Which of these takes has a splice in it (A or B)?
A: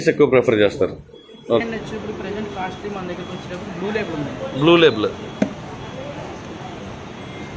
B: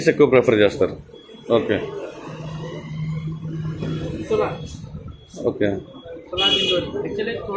A